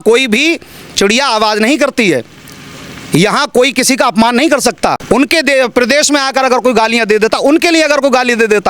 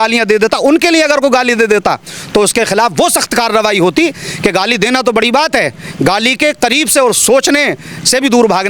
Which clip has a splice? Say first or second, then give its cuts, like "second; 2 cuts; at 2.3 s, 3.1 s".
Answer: first; 1 cut; at 5.0 s